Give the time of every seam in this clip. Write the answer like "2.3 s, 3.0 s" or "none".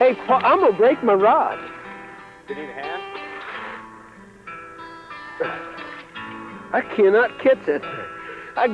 none